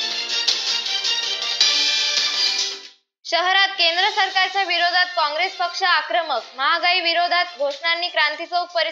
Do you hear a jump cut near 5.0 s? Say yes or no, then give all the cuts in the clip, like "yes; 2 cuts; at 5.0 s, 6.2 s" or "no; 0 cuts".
no; 1 cut; at 2.5 s